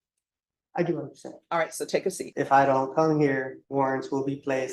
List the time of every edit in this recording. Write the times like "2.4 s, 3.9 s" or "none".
2.2 s, 3.6 s